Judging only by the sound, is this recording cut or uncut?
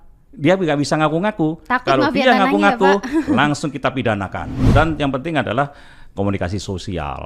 cut